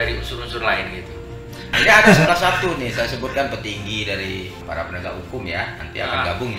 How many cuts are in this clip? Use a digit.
2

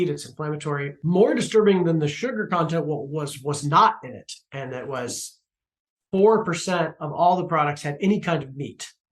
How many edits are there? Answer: 1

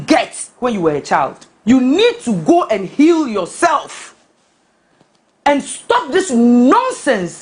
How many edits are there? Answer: 1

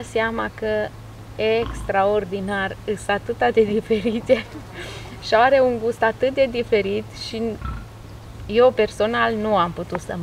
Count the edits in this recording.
0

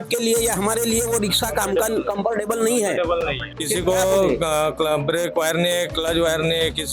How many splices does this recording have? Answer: 1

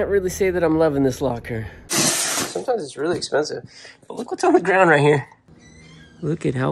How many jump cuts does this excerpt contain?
2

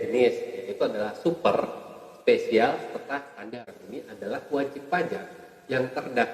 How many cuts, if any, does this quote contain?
1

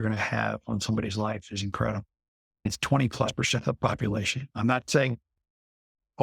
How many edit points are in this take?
2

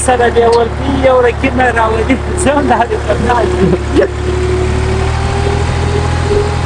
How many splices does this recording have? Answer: 0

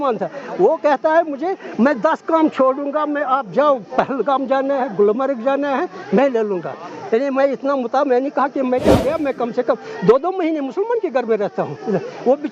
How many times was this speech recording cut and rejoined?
1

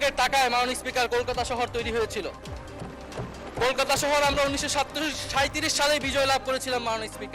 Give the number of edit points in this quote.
0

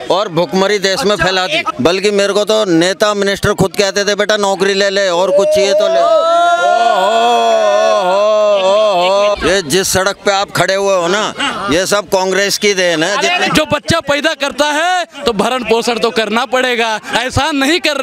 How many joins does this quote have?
3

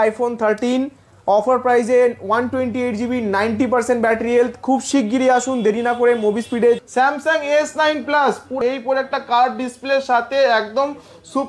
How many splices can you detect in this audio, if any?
2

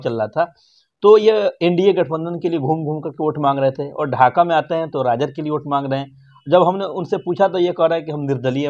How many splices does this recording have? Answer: 0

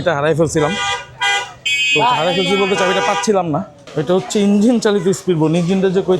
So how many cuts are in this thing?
1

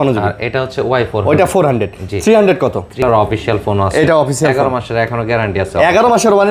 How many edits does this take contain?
1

